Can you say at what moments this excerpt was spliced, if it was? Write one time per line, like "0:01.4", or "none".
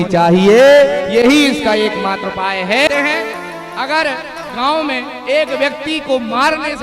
0:02.9